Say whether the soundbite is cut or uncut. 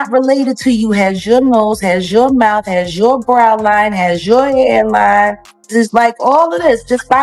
cut